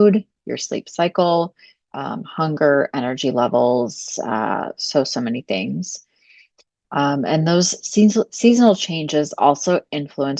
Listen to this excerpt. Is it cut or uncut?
uncut